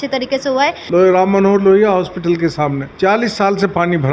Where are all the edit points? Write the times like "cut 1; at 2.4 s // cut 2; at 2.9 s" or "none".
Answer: cut 1; at 0.8 s // cut 2; at 2.9 s

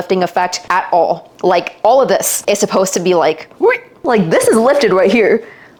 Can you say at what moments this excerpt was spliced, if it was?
none

